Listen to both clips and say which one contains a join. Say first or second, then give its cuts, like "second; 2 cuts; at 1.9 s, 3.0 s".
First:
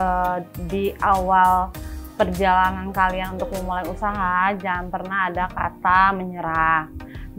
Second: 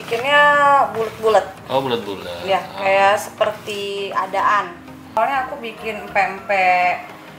second; 1 cut; at 5.2 s